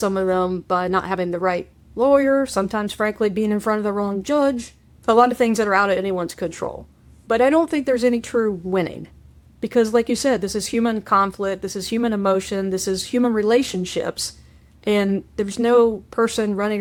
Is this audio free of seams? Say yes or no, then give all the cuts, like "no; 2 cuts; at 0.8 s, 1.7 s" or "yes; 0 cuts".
yes; 0 cuts